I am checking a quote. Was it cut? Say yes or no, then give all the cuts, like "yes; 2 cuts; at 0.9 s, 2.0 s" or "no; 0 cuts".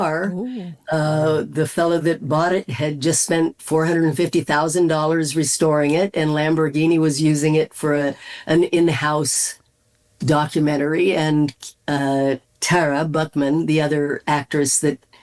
no; 0 cuts